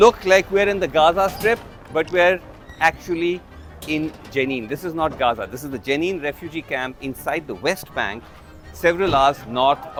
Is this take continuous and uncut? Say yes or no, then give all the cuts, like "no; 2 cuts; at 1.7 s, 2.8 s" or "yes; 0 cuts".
yes; 0 cuts